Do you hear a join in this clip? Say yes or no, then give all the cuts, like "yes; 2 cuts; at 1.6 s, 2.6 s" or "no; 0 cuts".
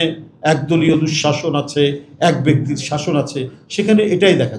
no; 0 cuts